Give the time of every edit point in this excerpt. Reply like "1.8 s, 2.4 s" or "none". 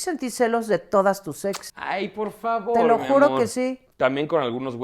1.7 s, 3.8 s